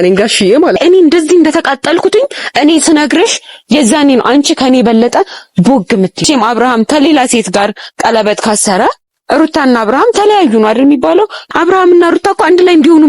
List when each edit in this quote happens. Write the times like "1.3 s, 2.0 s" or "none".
0.8 s, 6.2 s, 11.4 s